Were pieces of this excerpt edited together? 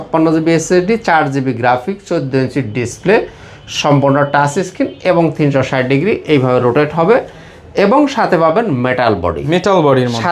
no; 0 cuts

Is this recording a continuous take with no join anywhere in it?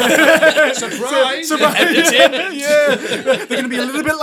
yes; 0 cuts

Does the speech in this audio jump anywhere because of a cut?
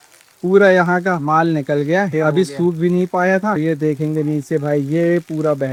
no; 0 cuts

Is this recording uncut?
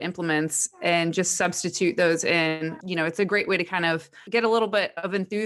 no; 2 cuts; at 2.8 s, 4.2 s

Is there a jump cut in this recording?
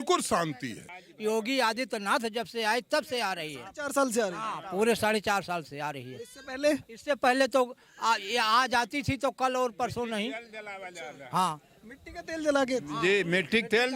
yes; 1 cut; at 1.0 s

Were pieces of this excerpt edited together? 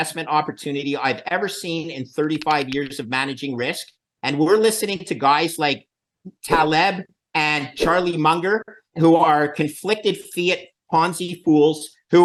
no; 0 cuts

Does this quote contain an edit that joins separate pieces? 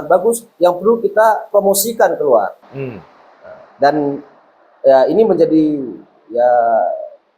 no; 0 cuts

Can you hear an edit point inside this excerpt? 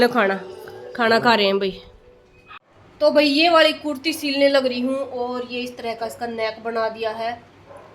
yes; 1 cut; at 2.7 s

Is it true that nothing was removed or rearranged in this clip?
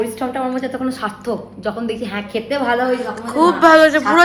yes; 0 cuts

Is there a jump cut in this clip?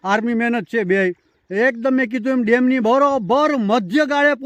no; 0 cuts

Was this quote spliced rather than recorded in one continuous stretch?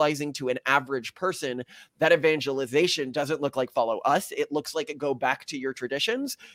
no; 0 cuts

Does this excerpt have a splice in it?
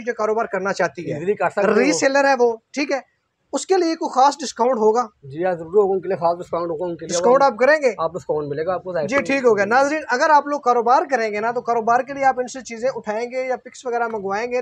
no; 0 cuts

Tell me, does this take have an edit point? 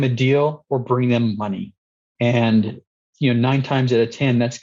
no; 0 cuts

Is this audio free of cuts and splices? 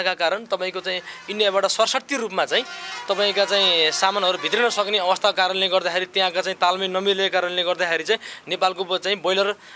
yes; 0 cuts

